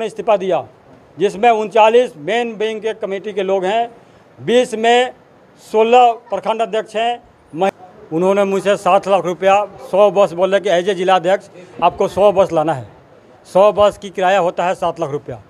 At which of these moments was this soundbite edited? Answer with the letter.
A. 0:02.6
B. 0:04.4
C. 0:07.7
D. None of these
C